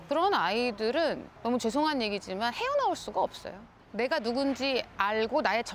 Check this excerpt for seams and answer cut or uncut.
cut